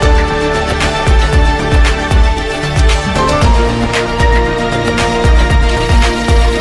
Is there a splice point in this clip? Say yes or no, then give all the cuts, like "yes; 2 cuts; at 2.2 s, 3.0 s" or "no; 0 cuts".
no; 0 cuts